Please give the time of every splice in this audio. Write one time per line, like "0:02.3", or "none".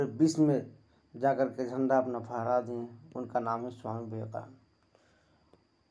none